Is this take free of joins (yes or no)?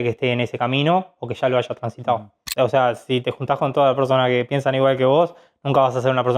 no